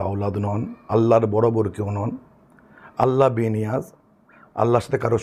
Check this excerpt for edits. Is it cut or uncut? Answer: uncut